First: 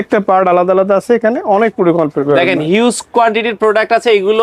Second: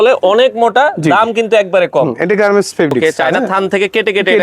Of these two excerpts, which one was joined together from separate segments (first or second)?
second